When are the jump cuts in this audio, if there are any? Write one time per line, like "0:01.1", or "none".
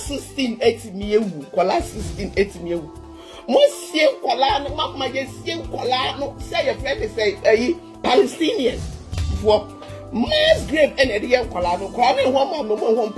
none